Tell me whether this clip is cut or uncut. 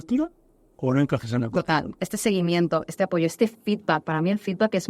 cut